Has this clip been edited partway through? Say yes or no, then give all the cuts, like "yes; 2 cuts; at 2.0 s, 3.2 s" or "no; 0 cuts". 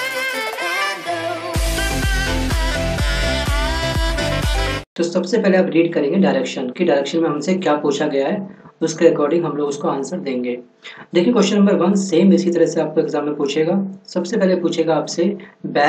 yes; 1 cut; at 11.0 s